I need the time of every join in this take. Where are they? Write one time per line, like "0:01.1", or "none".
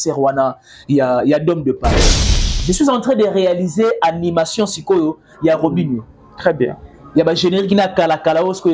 0:02.3